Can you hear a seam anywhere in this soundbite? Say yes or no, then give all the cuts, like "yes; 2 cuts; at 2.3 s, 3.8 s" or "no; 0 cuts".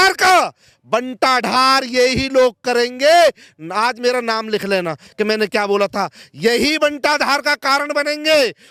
no; 0 cuts